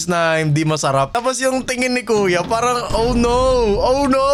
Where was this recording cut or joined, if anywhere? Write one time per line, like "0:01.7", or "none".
none